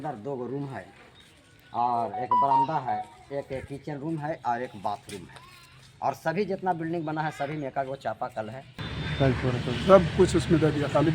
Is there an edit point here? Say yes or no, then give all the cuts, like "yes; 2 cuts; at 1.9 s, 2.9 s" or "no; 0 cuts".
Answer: yes; 1 cut; at 8.7 s